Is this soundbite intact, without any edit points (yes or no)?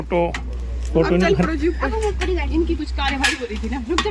yes